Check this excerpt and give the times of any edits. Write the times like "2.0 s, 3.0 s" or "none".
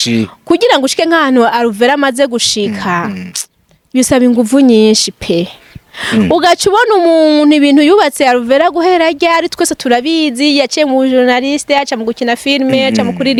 none